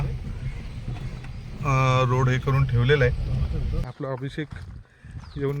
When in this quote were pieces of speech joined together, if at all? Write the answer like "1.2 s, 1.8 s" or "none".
3.8 s